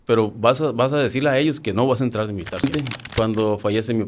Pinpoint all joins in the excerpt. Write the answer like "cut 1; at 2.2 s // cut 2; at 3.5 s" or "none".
cut 1; at 2.6 s